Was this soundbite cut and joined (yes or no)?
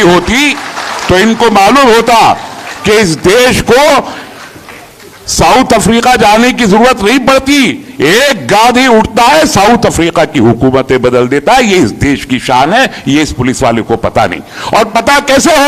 no